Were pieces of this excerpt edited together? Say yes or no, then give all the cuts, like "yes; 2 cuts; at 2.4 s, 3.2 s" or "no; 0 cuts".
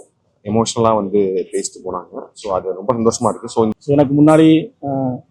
yes; 1 cut; at 3.7 s